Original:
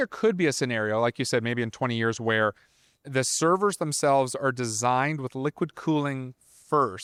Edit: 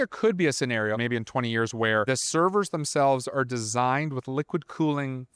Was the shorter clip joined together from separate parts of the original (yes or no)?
yes